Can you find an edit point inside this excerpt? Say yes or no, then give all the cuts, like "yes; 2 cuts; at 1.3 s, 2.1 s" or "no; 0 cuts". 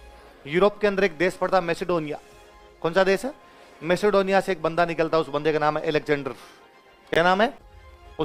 no; 0 cuts